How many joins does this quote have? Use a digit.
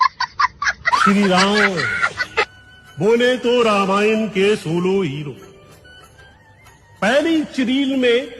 1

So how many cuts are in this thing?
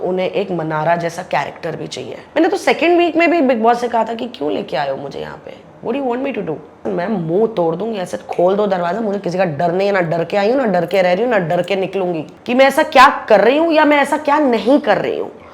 3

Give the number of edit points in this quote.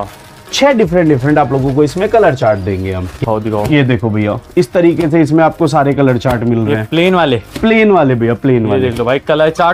1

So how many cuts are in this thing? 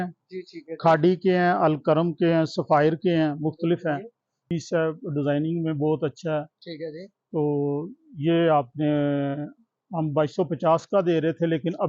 1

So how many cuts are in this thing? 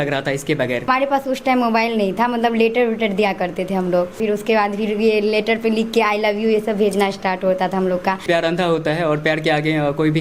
3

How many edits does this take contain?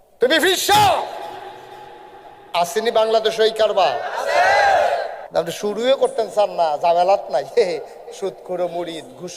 1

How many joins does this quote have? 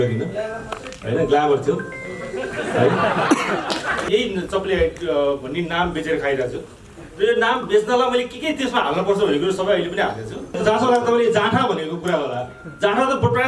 2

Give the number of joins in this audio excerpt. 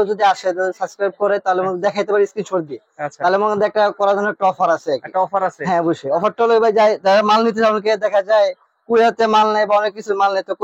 0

